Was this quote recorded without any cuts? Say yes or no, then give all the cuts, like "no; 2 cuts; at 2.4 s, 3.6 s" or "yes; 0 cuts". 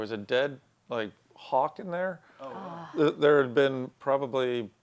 yes; 0 cuts